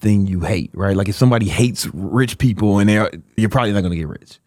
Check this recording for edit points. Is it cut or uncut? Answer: cut